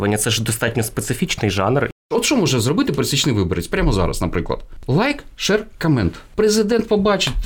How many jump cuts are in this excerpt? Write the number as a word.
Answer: three